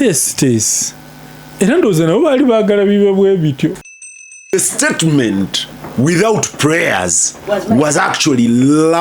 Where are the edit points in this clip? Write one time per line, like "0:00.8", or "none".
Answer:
0:04.3